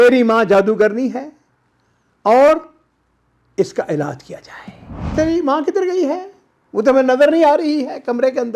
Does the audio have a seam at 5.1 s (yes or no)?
yes